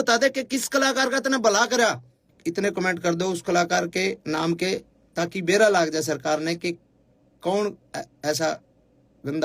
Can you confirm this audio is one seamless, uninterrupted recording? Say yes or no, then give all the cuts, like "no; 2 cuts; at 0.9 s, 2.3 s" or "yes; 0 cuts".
no; 1 cut; at 2.3 s